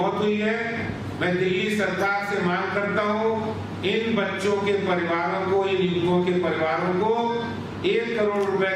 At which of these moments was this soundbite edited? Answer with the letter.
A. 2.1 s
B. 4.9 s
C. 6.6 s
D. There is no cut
D